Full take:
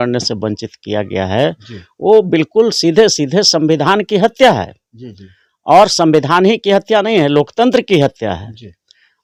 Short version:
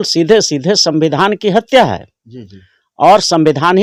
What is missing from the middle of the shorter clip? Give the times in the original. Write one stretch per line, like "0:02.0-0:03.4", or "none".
none

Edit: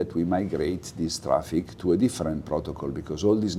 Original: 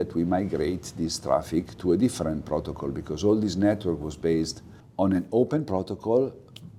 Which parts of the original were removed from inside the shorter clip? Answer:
none

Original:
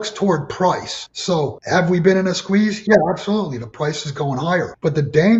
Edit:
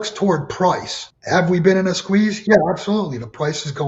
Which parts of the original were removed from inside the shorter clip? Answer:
0:01.2-0:01.6

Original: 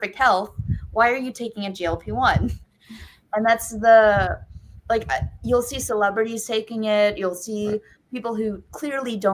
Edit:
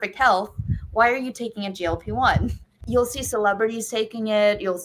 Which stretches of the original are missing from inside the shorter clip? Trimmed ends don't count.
0:02.8-0:05.3

